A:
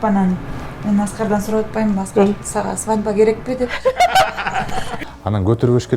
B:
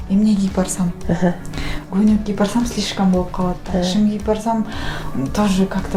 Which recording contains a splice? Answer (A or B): A